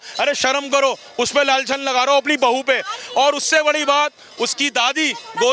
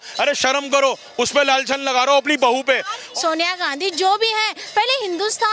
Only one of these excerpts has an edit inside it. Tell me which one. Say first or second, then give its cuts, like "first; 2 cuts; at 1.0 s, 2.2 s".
second; 1 cut; at 3.0 s